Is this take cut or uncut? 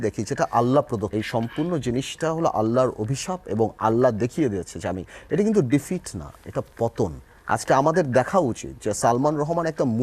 cut